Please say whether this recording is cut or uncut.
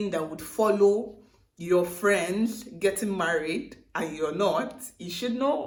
uncut